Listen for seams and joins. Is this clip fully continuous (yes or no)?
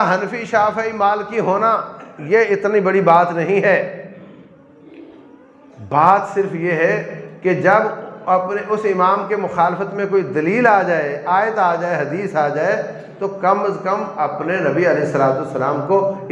yes